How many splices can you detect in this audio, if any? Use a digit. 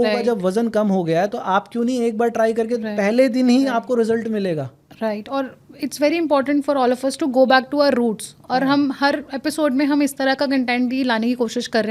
0